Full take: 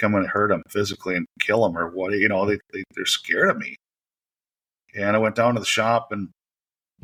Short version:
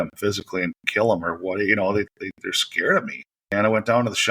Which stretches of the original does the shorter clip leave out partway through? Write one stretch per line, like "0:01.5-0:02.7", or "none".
0:03.8-0:04.8